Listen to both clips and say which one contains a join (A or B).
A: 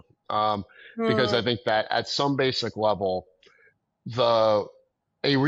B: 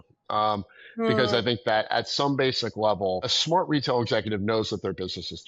B